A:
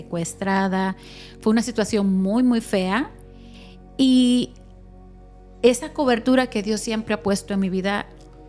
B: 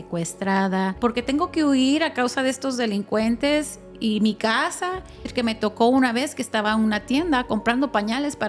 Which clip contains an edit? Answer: B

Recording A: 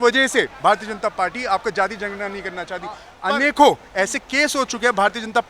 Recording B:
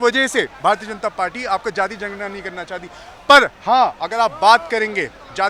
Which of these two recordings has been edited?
A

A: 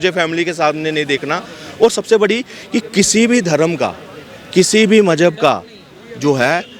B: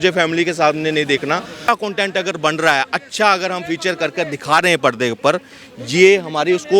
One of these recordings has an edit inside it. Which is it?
B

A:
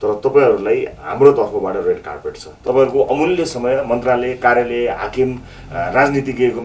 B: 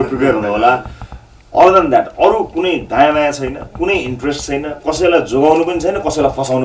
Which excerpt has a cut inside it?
A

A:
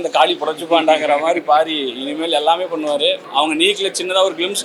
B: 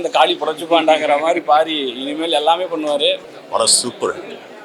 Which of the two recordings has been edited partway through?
B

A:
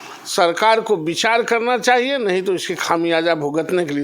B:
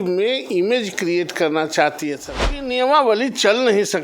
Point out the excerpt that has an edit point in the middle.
B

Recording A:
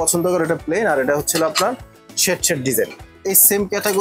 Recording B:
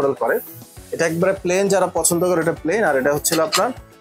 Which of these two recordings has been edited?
A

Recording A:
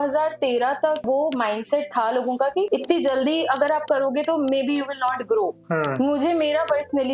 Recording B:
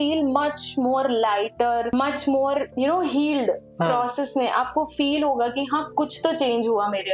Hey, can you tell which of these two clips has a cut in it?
A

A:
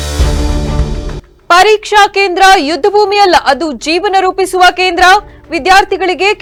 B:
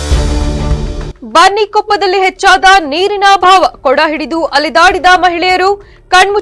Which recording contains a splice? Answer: B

